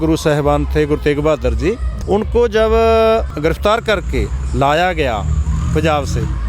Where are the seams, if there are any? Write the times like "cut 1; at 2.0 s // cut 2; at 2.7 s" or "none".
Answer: cut 1; at 1.9 s // cut 2; at 3.3 s